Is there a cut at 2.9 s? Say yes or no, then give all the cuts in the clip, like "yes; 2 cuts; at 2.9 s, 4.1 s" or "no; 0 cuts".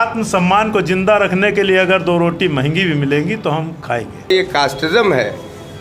no; 1 cut; at 4.3 s